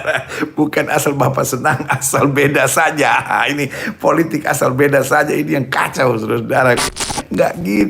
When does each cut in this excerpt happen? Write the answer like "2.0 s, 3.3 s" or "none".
6.8 s